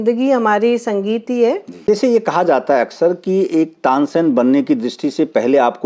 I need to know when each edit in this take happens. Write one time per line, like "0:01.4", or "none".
0:01.8